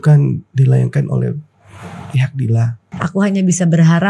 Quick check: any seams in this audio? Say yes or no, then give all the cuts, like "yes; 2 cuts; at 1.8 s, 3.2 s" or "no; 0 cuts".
no; 0 cuts